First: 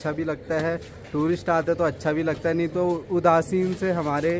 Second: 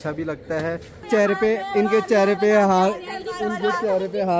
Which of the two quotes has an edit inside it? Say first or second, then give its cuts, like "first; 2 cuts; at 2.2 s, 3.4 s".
second; 1 cut; at 1.1 s